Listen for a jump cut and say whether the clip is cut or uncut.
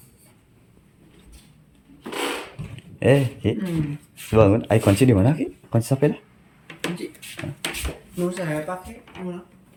uncut